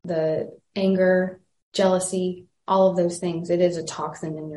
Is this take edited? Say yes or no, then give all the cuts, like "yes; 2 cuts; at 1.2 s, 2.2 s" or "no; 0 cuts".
no; 0 cuts